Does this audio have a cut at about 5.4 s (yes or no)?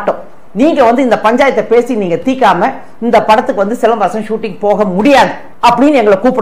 yes